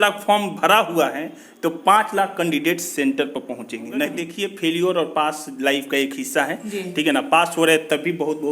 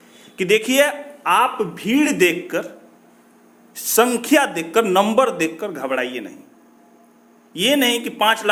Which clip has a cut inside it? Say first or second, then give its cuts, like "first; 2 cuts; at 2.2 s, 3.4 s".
first; 1 cut; at 4.2 s